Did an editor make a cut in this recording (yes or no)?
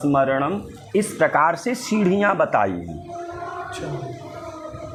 no